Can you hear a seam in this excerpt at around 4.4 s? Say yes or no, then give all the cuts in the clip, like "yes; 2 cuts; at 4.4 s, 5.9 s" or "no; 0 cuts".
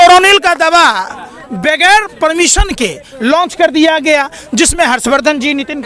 no; 0 cuts